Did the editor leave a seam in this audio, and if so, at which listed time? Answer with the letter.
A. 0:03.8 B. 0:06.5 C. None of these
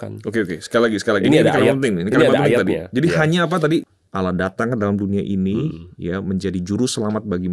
A